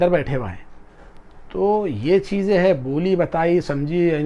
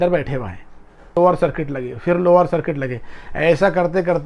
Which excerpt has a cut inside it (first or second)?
second